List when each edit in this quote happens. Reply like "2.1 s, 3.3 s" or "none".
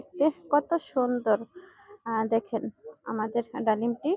none